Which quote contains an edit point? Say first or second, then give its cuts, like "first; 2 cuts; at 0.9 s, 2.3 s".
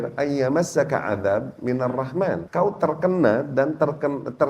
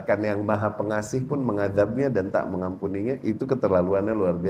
first; 1 cut; at 2.5 s